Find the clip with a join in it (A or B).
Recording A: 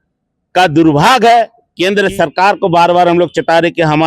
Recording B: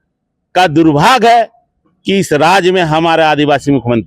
A